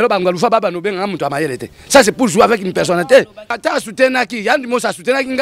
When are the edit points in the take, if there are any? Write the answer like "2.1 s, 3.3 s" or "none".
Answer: 3.5 s